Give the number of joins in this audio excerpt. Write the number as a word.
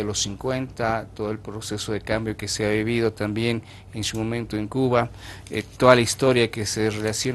one